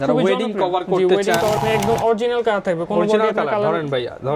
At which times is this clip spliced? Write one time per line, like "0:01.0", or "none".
0:01.6

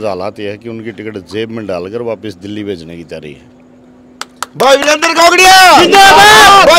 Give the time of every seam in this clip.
none

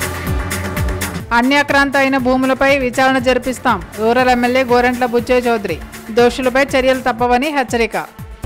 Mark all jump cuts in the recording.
0:01.1

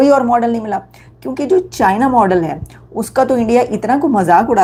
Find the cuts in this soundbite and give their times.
none

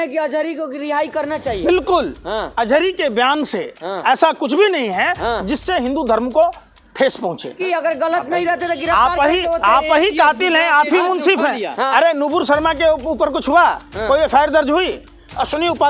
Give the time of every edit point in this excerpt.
0:07.5

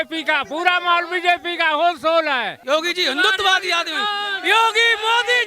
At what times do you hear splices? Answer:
0:02.6

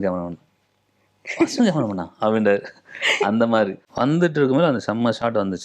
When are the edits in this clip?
0:03.8

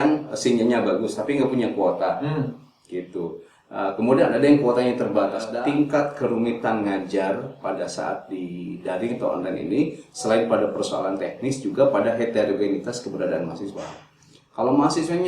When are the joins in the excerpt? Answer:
0:05.5

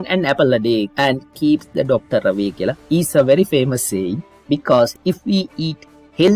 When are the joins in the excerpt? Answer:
0:00.9
0:02.8

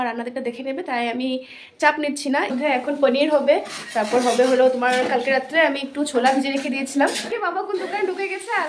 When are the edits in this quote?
0:02.5
0:07.3

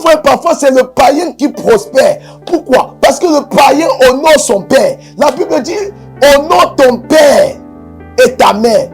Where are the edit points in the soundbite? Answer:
none

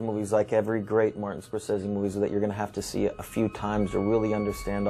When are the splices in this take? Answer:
none

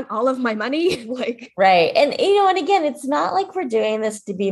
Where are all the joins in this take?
none

